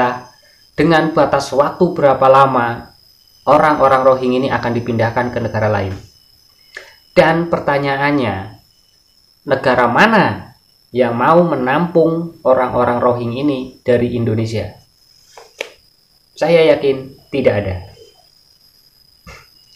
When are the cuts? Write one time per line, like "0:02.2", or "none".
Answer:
none